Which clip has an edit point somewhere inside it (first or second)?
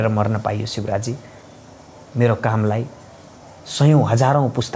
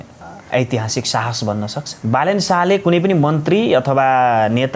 second